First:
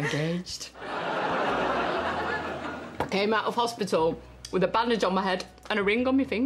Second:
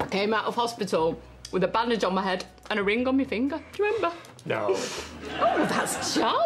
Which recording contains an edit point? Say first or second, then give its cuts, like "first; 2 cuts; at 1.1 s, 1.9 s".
first; 1 cut; at 1.0 s